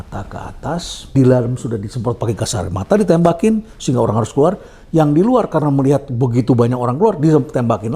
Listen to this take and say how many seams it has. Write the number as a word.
one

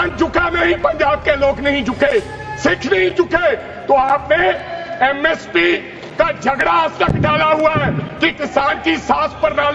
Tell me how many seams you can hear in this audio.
zero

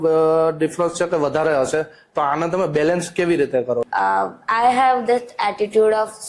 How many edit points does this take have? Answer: one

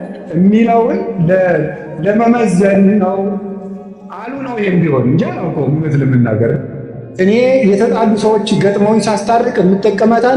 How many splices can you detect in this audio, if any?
one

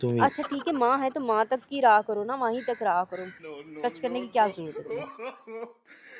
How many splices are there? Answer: zero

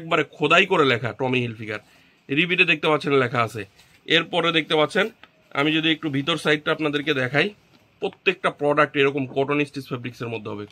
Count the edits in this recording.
zero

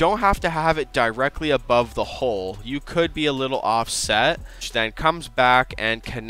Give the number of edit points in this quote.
one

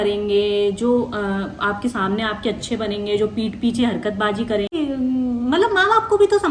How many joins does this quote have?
one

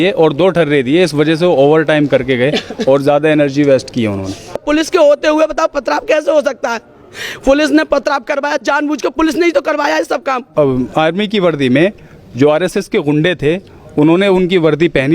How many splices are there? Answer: two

